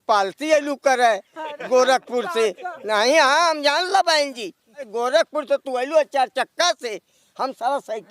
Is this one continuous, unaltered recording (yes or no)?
no